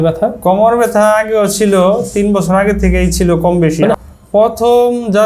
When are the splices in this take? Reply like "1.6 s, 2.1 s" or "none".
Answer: 4.0 s